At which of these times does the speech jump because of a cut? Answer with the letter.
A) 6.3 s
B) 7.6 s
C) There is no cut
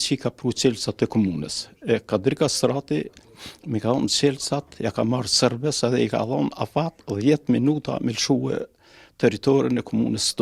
C